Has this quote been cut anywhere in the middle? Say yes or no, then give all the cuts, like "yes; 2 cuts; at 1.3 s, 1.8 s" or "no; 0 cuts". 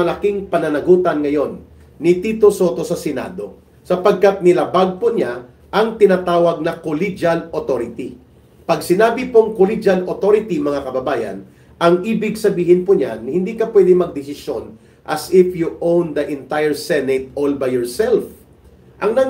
no; 0 cuts